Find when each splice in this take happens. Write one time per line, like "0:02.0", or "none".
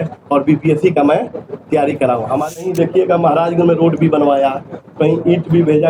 0:02.6